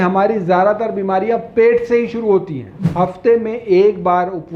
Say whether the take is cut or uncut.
cut